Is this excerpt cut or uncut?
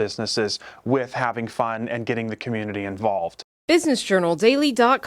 cut